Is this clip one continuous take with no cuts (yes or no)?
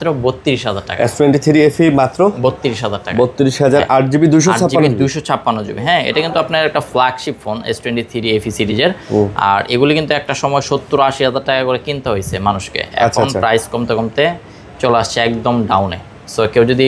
yes